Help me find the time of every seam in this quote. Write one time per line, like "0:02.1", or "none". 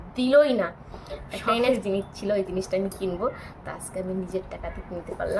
0:01.7

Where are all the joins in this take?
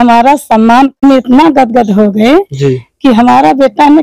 0:00.9

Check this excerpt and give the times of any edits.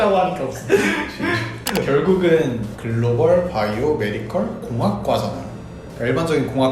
0:01.5

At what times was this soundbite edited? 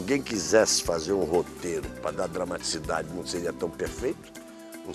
none

